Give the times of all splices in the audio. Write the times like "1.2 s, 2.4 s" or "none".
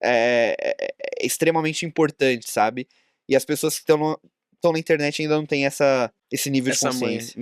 6.2 s